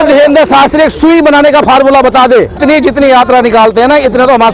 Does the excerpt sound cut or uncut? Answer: cut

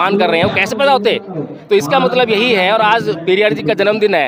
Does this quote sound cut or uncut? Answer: uncut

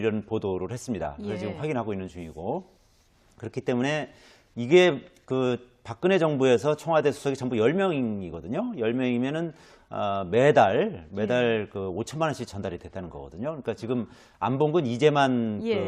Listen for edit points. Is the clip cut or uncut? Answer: cut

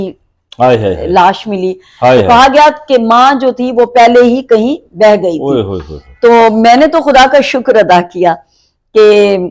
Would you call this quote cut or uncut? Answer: uncut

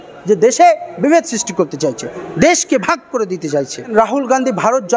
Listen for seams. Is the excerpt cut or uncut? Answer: cut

